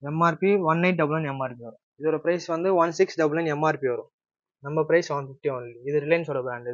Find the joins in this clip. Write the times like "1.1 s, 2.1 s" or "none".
1.8 s